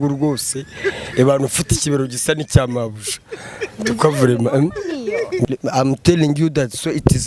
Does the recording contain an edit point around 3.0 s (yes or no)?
no